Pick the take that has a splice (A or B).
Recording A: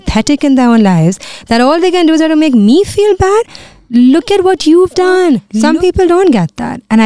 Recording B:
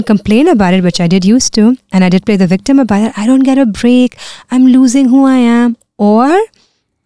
A